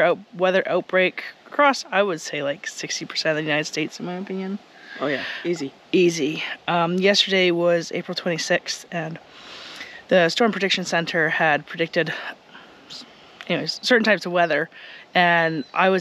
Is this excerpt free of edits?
yes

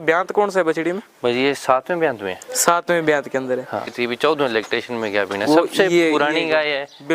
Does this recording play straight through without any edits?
no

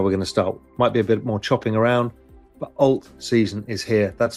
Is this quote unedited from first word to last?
yes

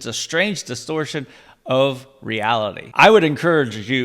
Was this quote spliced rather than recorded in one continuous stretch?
yes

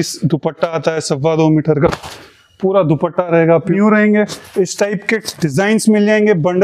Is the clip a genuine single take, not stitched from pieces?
no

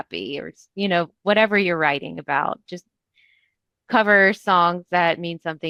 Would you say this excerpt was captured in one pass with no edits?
yes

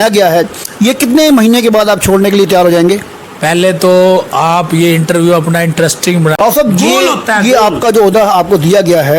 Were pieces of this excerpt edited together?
yes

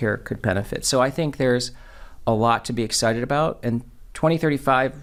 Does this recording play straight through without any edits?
yes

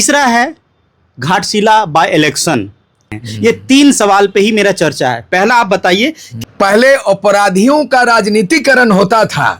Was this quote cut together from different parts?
yes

